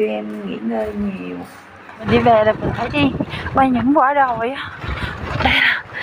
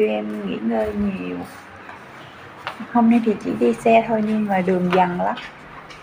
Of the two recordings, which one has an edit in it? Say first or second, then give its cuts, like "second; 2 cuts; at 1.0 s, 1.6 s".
first; 1 cut; at 2.0 s